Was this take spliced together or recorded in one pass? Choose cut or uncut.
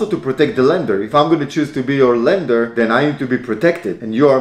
cut